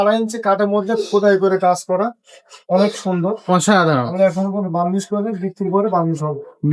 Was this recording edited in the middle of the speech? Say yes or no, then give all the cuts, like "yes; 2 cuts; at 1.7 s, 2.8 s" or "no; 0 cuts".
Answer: no; 0 cuts